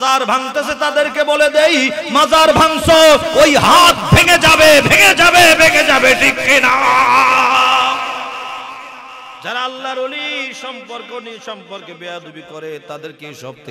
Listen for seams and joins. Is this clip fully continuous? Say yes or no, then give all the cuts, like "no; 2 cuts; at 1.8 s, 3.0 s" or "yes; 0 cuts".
yes; 0 cuts